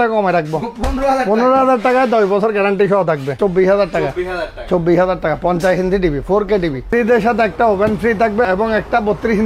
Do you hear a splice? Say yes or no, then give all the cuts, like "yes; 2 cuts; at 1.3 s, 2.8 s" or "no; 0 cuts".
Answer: yes; 3 cuts; at 3.4 s, 6.8 s, 8.4 s